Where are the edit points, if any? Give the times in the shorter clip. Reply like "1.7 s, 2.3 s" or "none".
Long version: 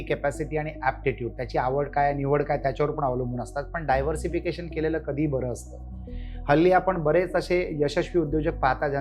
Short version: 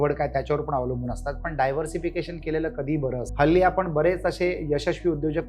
3.3 s